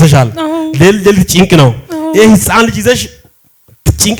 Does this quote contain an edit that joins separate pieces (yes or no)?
no